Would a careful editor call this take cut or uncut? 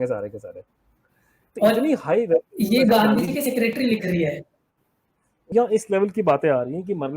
cut